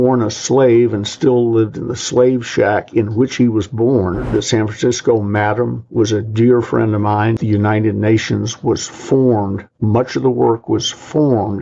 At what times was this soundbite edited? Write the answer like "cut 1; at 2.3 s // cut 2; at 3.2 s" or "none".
cut 1; at 4.3 s // cut 2; at 7.4 s